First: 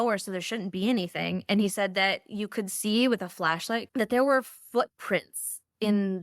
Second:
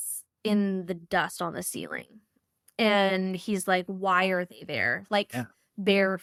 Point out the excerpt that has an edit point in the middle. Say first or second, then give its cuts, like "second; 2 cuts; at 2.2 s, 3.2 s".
first; 1 cut; at 3.9 s